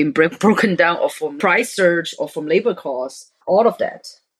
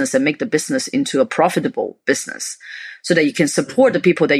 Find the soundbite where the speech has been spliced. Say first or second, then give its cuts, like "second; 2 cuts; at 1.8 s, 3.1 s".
first; 2 cuts; at 1.3 s, 3.4 s